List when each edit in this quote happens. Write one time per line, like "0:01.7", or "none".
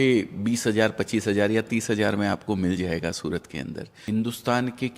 0:03.9